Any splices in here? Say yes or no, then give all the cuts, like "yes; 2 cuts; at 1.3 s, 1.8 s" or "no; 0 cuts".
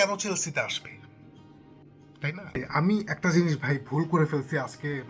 yes; 1 cut; at 2.7 s